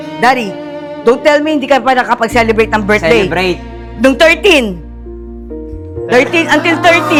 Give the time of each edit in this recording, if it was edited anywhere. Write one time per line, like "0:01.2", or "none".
none